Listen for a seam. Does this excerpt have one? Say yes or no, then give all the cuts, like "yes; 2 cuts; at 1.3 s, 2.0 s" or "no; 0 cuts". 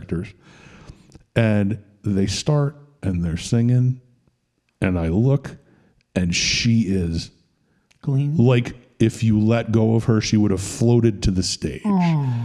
no; 0 cuts